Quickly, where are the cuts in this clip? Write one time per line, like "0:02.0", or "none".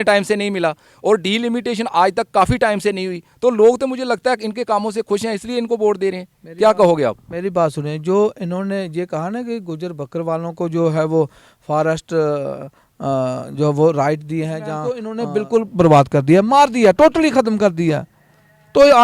0:15.1